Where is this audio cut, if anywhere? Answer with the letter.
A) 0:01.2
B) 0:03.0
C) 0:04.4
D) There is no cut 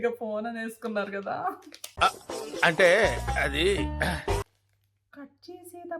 C